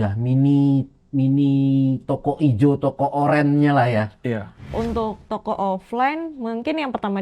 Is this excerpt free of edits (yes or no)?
no